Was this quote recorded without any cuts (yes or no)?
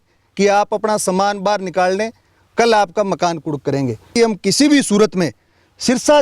no